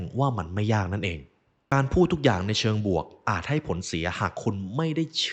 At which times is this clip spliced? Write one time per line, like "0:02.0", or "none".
0:01.7